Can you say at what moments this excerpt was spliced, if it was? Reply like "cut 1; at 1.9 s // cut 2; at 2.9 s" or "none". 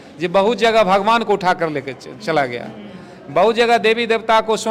none